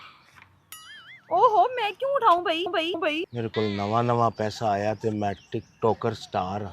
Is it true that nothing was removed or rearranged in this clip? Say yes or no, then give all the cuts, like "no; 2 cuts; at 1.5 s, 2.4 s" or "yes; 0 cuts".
no; 1 cut; at 3.0 s